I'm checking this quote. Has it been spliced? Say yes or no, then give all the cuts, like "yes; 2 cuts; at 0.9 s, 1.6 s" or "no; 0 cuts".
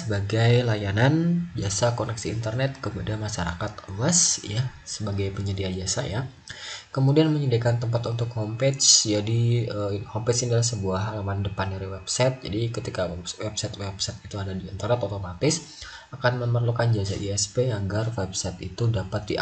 no; 0 cuts